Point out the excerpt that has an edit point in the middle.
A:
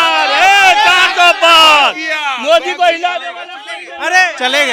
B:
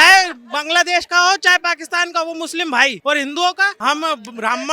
B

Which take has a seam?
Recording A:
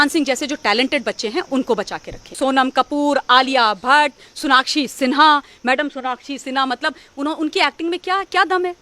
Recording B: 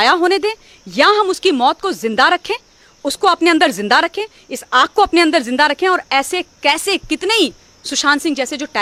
A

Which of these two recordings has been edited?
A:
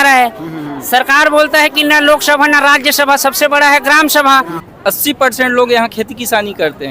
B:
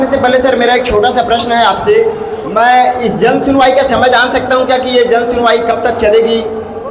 A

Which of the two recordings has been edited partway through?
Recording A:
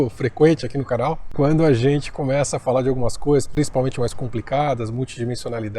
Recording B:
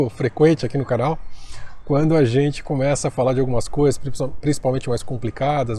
A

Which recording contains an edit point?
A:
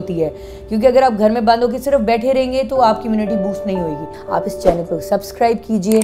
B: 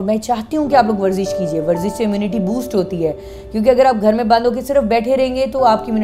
A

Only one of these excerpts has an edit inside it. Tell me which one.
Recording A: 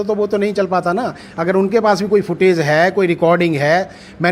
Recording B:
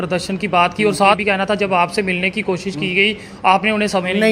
B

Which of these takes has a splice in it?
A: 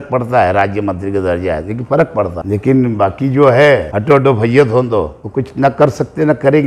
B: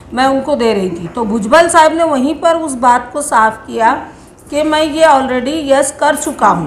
A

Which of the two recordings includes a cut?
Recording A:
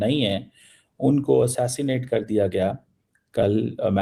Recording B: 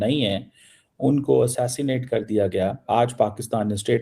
B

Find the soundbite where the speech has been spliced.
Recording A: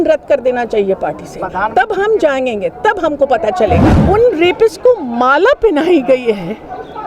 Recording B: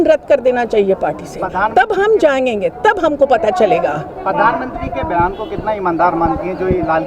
A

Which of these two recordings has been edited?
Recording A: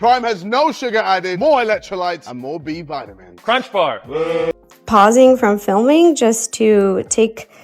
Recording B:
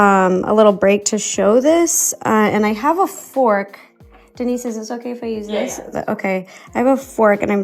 A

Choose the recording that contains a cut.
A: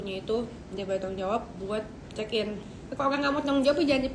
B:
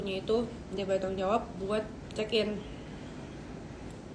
A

